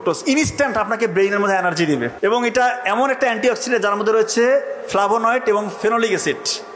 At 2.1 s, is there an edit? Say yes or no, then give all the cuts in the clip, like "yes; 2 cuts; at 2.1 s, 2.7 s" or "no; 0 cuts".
yes; 1 cut; at 2.1 s